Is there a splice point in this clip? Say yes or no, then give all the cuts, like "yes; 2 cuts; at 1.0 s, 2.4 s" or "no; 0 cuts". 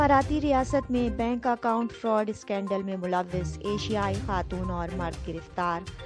no; 0 cuts